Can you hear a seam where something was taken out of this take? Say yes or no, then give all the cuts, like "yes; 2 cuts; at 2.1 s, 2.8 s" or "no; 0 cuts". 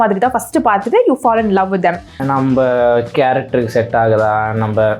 yes; 1 cut; at 2.2 s